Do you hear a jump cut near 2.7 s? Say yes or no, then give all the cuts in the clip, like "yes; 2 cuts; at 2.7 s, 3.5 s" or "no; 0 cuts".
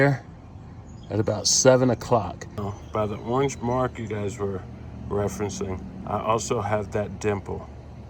yes; 1 cut; at 2.7 s